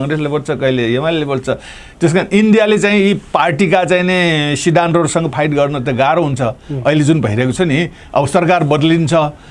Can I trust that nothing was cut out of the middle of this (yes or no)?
yes